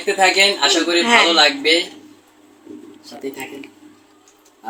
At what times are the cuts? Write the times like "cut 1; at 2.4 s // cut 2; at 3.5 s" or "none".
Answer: none